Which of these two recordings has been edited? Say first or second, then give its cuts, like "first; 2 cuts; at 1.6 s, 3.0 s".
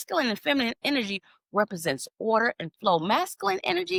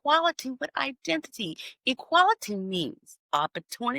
second; 1 cut; at 3.1 s